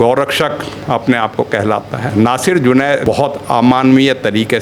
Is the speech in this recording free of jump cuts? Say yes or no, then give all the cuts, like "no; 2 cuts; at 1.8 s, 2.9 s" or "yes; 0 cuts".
no; 2 cuts; at 2.1 s, 3.0 s